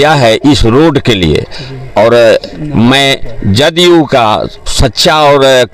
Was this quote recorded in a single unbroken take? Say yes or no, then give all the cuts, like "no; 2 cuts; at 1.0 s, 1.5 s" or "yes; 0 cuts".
yes; 0 cuts